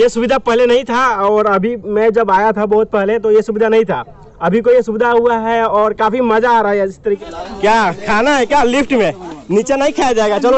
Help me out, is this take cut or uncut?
cut